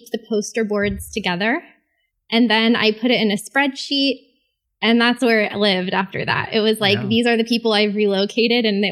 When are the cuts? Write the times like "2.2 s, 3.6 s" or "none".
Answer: none